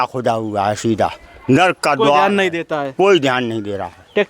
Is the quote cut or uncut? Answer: uncut